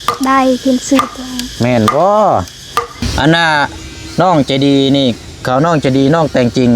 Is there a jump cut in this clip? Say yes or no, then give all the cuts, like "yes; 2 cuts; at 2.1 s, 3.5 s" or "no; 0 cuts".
yes; 1 cut; at 3.1 s